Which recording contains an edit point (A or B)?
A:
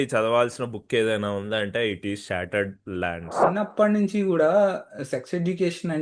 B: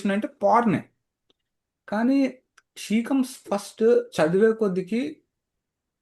A